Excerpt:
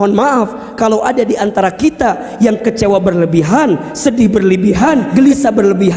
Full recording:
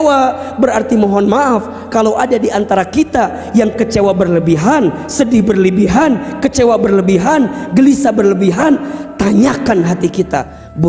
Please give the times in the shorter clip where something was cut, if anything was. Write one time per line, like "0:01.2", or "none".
0:05.1